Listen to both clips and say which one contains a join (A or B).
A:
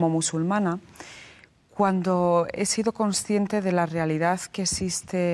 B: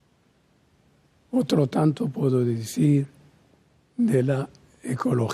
B